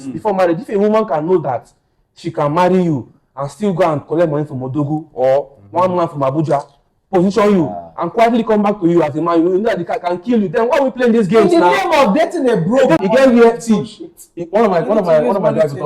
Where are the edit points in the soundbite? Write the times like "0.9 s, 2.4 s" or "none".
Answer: 13.0 s